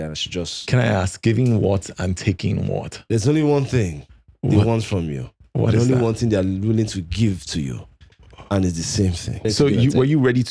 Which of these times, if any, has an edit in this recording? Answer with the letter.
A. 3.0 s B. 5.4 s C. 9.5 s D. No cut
C